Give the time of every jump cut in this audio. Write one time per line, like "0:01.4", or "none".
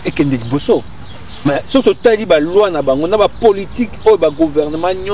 none